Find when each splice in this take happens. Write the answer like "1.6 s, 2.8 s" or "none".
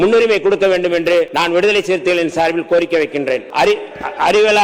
1.3 s, 3.5 s

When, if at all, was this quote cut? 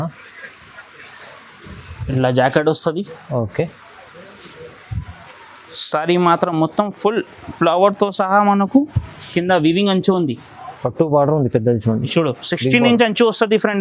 none

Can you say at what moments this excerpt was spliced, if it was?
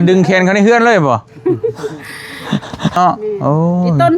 3.0 s

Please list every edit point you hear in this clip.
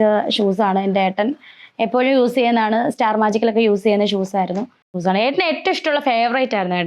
5.0 s

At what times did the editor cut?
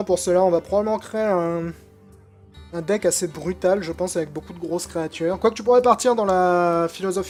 none

